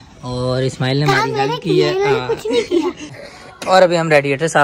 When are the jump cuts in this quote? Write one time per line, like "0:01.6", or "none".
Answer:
0:03.3